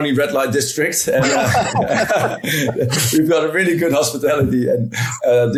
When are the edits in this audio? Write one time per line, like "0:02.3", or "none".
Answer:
none